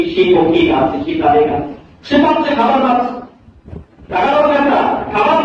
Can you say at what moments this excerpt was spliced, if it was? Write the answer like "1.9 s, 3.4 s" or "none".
none